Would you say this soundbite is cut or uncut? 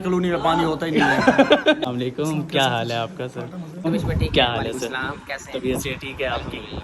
cut